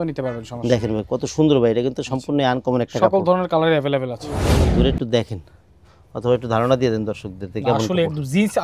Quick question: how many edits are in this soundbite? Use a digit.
1